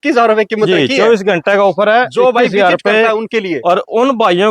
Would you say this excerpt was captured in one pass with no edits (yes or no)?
yes